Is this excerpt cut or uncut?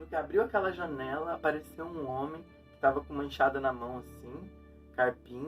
uncut